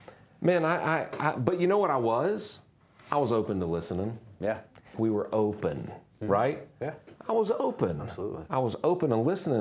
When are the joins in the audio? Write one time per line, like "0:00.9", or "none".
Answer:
0:04.9